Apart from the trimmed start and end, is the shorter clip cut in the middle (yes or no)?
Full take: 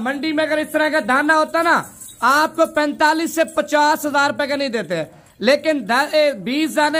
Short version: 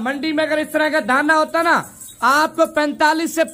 no